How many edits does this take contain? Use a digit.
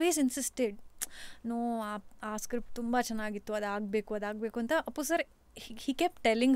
0